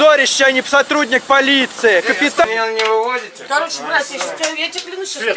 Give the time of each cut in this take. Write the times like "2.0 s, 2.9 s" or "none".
2.4 s